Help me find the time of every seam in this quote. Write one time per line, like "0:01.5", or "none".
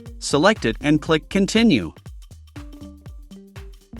0:02.4

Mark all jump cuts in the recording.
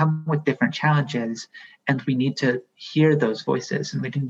none

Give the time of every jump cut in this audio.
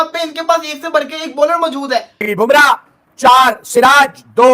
0:02.3

